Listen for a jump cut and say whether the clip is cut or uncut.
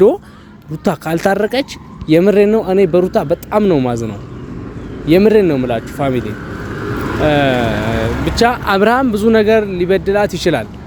uncut